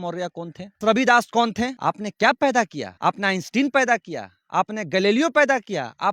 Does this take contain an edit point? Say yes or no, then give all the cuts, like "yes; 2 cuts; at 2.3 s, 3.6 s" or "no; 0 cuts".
yes; 3 cuts; at 0.8 s, 1.8 s, 2.8 s